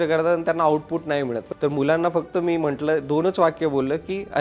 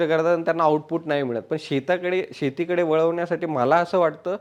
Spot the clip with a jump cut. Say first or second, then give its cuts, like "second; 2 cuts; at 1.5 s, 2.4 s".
first; 1 cut; at 1.5 s